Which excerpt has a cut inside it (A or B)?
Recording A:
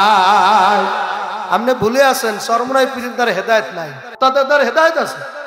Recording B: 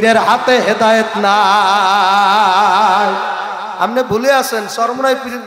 A